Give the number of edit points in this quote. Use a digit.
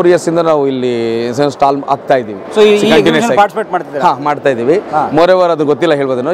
0